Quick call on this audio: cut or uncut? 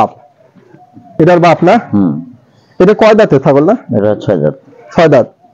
cut